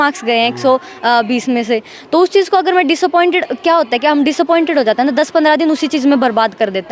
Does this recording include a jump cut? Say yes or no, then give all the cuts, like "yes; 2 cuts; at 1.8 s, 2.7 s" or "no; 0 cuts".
no; 0 cuts